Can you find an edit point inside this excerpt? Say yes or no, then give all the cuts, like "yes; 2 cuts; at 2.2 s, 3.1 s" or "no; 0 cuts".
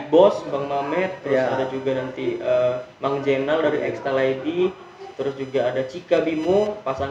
no; 0 cuts